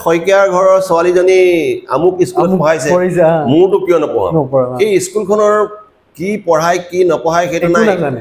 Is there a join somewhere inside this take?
no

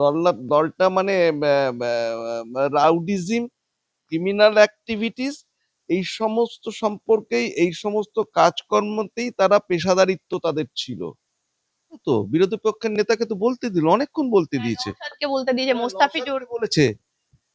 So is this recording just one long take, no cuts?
no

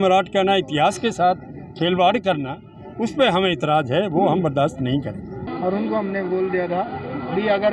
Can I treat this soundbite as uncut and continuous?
no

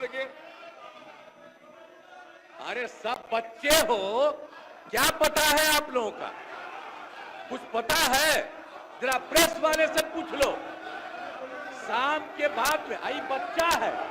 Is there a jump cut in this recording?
no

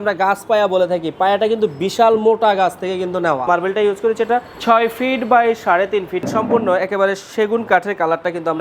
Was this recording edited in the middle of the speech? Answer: yes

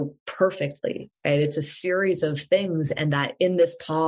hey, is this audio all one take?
yes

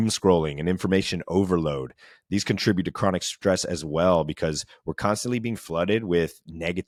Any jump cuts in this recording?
no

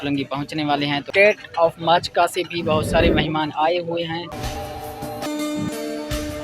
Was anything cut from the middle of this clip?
yes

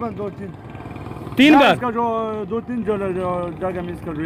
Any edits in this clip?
no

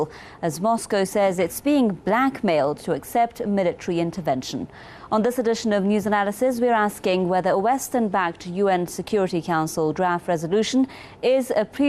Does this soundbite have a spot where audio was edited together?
no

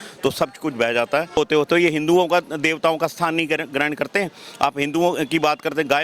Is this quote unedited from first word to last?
no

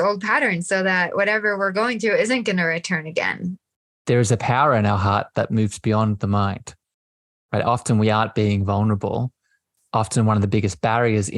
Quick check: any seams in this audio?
yes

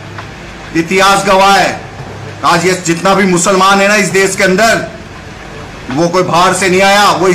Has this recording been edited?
no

